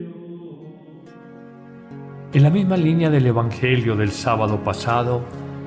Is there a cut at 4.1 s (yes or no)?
yes